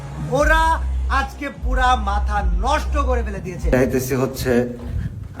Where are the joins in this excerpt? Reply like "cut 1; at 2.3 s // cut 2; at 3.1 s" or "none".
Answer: cut 1; at 3.7 s

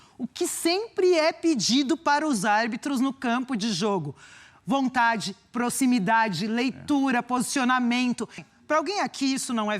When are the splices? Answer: cut 1; at 8.4 s

